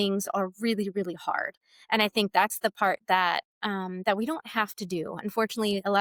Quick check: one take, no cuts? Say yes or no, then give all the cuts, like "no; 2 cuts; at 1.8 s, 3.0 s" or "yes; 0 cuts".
yes; 0 cuts